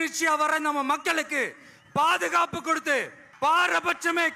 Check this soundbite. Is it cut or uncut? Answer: uncut